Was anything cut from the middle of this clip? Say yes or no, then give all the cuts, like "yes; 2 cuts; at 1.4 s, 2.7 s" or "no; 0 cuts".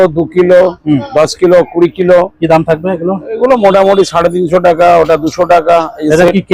no; 0 cuts